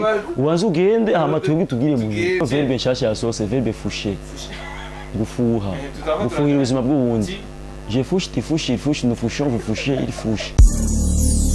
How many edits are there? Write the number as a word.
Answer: two